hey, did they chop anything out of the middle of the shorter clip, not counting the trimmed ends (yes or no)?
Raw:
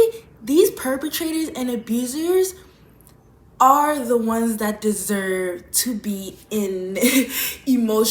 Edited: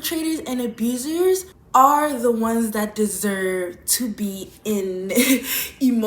yes